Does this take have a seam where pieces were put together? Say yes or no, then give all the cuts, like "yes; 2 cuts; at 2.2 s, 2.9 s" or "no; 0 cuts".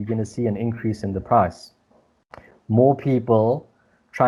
no; 0 cuts